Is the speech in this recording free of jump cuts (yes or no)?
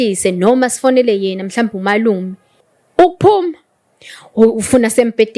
no